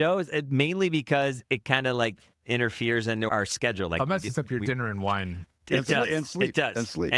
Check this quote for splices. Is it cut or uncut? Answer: uncut